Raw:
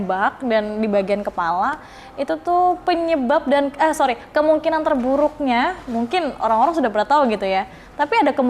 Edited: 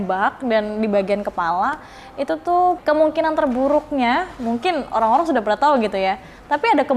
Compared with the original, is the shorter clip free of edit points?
no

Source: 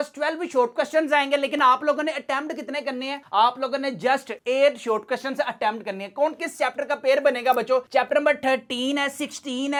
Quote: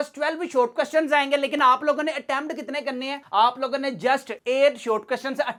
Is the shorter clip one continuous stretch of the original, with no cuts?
yes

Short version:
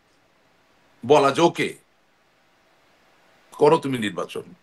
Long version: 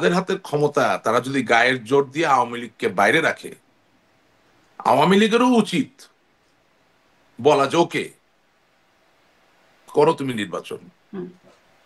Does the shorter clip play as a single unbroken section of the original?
yes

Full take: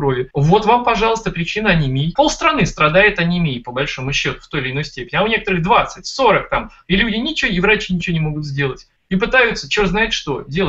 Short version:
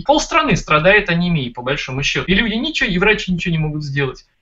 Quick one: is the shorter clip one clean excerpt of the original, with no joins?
no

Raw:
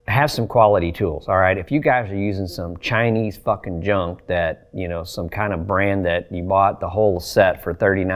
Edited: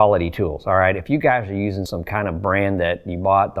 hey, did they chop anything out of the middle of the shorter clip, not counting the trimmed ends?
yes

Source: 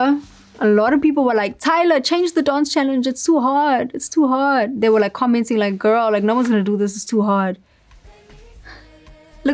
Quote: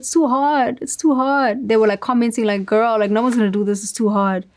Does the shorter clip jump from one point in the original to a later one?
no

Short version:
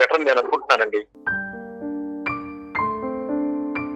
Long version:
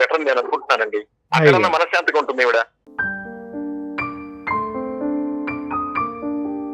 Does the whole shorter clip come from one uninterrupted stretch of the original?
no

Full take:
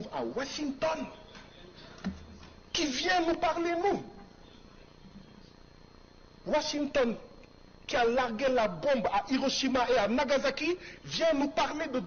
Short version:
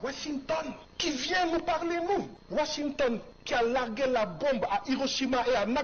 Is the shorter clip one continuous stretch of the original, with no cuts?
no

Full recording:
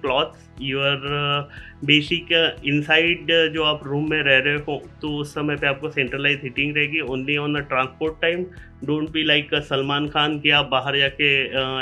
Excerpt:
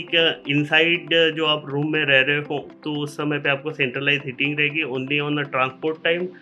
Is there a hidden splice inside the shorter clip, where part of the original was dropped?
no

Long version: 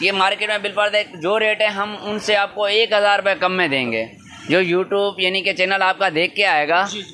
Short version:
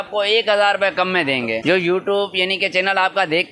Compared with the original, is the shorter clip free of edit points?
no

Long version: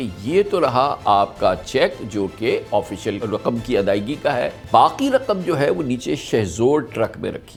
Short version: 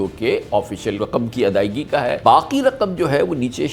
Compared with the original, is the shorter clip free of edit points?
no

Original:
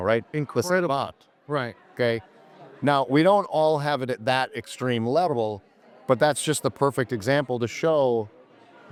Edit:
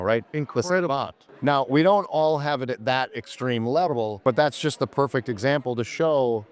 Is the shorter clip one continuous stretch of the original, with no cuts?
no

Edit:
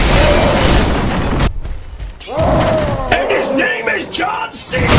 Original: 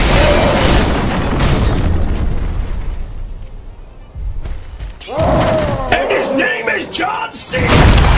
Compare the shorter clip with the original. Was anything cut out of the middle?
yes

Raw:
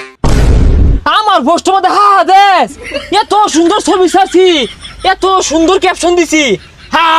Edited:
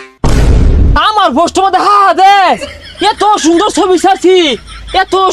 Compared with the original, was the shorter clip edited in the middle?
yes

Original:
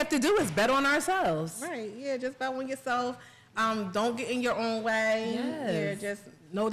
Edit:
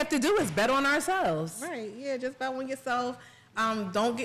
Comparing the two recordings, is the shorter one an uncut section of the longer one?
yes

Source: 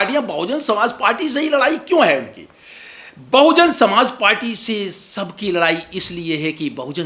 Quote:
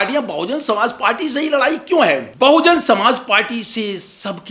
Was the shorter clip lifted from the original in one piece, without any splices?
no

